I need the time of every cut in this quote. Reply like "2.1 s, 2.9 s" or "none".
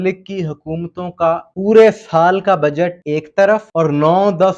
1.5 s, 3.0 s, 3.7 s